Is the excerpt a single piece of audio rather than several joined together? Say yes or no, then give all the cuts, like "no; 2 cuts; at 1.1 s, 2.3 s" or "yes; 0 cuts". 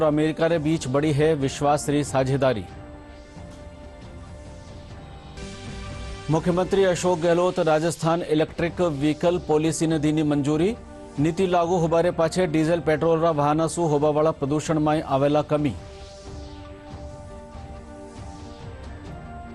yes; 0 cuts